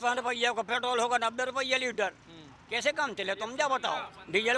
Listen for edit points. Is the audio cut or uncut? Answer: uncut